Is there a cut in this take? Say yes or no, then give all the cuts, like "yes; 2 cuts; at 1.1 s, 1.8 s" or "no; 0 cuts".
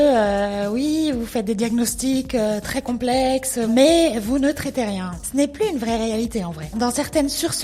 yes; 2 cuts; at 3.7 s, 5.2 s